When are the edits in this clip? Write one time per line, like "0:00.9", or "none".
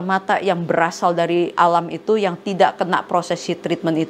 0:01.6